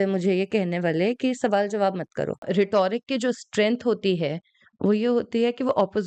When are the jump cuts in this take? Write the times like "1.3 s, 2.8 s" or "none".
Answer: 2.4 s

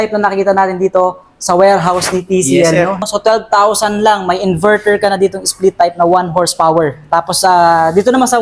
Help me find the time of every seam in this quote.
3.0 s

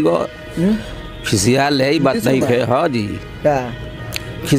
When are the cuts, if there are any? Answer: none

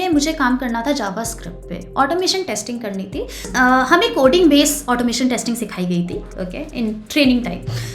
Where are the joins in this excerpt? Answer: 3.5 s

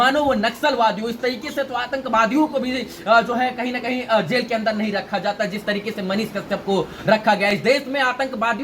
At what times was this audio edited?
none

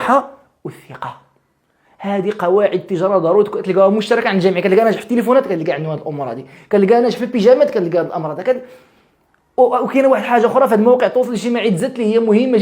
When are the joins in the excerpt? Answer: none

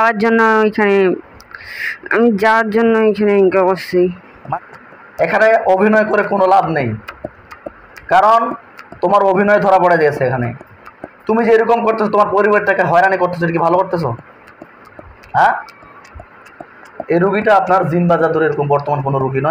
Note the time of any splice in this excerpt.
4.3 s

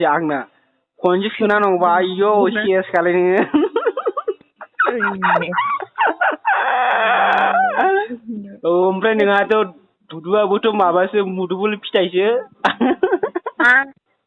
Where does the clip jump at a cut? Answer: none

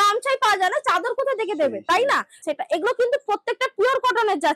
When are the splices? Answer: 2.3 s

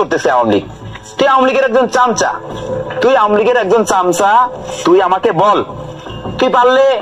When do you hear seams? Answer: 4.6 s

